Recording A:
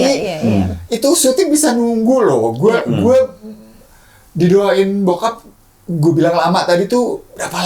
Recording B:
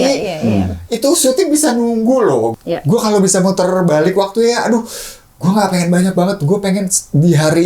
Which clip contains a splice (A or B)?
B